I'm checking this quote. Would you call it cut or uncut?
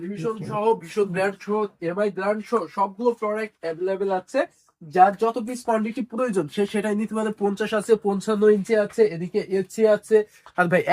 uncut